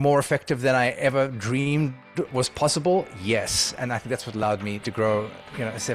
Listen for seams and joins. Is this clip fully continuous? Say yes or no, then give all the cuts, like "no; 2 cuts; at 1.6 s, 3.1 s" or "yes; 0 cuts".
no; 2 cuts; at 2.3 s, 4.9 s